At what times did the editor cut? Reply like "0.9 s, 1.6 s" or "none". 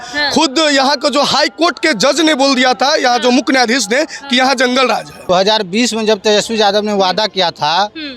5.3 s